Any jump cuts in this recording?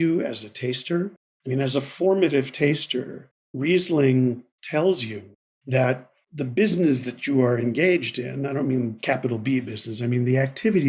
no; 0 cuts

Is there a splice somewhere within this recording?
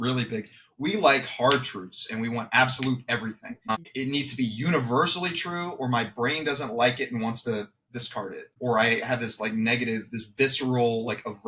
yes; 2 cuts; at 3.6 s, 8.5 s

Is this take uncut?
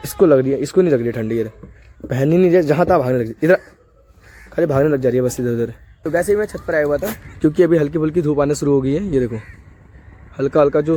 yes; 0 cuts

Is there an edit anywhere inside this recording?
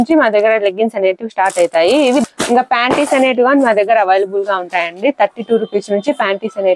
yes; 1 cut; at 2.2 s

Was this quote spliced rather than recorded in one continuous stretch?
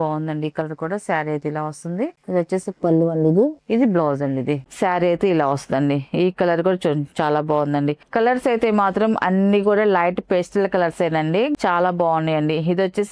yes; 2 cuts; at 4.7 s, 11.6 s

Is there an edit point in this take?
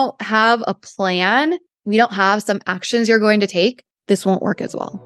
yes; 2 cuts; at 1.7 s, 3.9 s

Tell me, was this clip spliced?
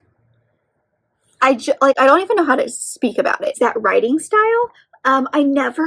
yes; 1 cut; at 3.6 s

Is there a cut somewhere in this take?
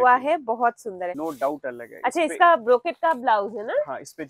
yes; 1 cut; at 1.1 s

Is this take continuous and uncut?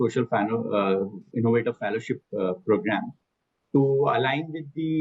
yes; 0 cuts

